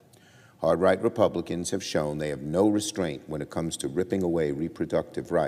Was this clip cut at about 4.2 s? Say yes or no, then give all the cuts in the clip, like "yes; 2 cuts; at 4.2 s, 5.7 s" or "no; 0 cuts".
no; 1 cut; at 2.9 s